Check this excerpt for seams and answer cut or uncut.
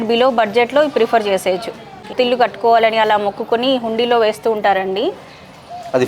cut